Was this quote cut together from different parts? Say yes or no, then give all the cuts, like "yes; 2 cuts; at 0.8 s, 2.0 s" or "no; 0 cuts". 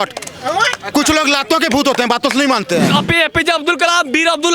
yes; 1 cut; at 2.9 s